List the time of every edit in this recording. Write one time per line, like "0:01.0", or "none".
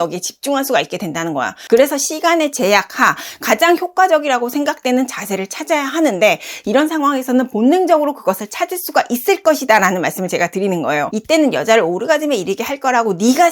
0:01.6
0:11.1

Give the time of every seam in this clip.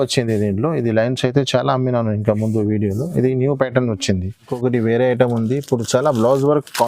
0:04.4

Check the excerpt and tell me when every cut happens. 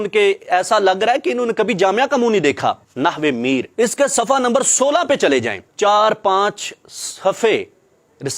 0:02.9
0:05.6

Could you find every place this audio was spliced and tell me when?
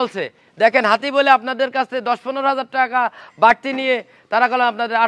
none

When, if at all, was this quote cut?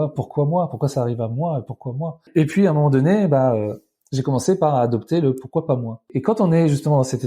0:02.3
0:06.1

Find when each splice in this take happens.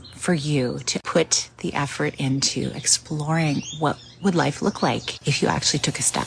0:01.0
0:05.1

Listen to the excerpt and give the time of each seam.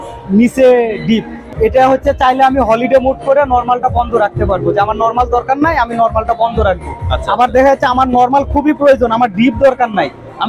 0:01.4

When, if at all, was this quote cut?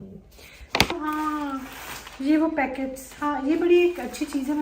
0:00.9

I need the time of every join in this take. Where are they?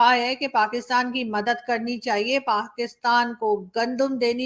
none

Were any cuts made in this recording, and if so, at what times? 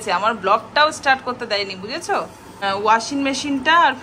0:02.6

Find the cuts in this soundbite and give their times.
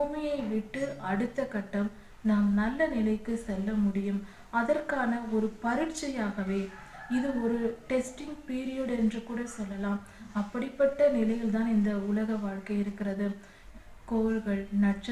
0:13.5

